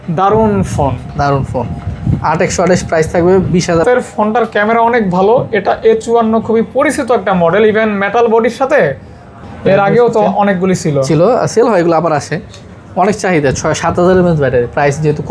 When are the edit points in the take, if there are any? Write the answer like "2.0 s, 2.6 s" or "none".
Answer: 3.8 s, 9.3 s